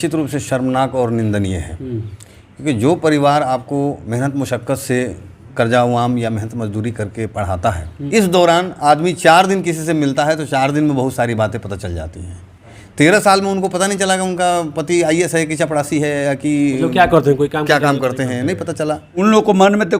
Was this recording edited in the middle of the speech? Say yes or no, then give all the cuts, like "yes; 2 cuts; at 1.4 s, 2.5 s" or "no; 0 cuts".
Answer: yes; 2 cuts; at 8.1 s, 19.2 s